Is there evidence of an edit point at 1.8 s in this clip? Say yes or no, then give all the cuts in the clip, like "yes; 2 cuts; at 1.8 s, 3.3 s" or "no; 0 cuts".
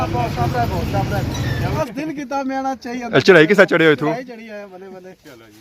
yes; 1 cut; at 1.8 s